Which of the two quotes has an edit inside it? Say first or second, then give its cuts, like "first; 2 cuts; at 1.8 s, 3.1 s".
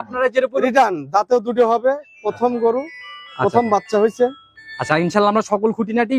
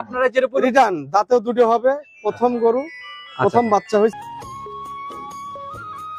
second; 1 cut; at 4.1 s